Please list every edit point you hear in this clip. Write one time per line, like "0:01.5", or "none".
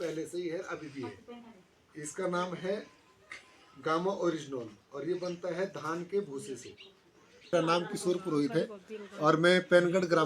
0:07.5